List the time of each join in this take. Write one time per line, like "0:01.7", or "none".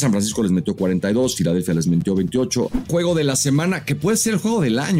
0:02.8